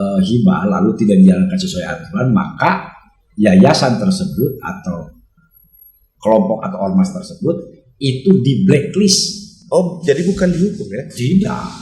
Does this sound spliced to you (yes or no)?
no